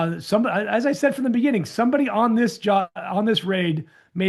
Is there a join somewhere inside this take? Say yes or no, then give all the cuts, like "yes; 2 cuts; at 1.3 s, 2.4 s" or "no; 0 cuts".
no; 0 cuts